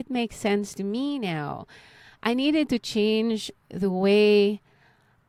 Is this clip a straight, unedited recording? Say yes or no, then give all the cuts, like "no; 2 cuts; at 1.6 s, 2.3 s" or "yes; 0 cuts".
yes; 0 cuts